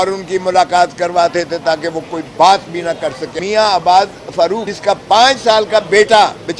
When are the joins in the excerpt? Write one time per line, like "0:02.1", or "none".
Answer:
0:03.2
0:04.7